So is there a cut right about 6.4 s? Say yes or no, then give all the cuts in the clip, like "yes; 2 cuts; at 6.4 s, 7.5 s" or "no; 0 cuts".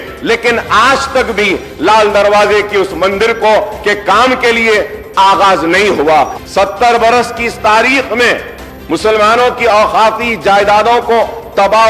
yes; 1 cut; at 6.4 s